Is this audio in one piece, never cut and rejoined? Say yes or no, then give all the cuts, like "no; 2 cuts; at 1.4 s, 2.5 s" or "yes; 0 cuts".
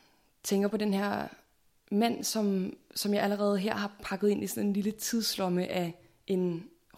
yes; 0 cuts